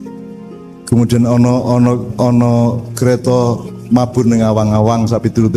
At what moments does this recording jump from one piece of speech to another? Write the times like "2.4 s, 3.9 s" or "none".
none